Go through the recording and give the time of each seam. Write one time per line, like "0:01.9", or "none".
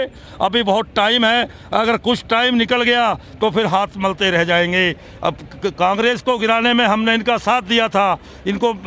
none